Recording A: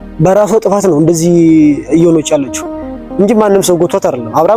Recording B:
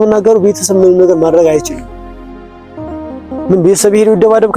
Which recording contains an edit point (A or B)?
B